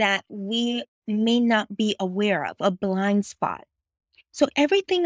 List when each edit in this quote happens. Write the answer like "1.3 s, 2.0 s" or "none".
none